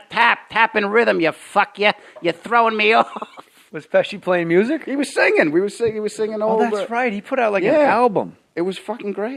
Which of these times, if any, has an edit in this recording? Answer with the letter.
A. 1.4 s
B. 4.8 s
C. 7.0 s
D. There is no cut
D